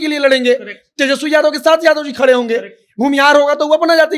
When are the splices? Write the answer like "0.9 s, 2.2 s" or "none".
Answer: none